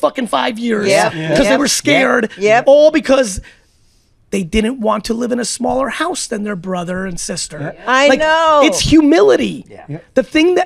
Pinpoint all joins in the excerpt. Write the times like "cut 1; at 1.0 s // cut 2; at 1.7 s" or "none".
none